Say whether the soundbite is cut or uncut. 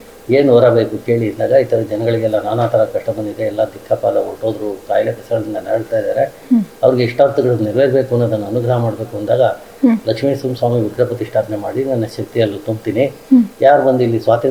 uncut